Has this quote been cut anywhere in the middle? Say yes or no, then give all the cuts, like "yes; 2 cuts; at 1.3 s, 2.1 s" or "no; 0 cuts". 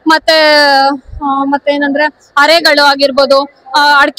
no; 0 cuts